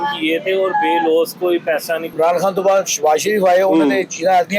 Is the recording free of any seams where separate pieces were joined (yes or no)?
no